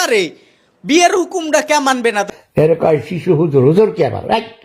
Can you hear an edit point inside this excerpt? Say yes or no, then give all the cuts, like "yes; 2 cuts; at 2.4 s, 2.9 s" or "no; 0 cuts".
yes; 1 cut; at 2.3 s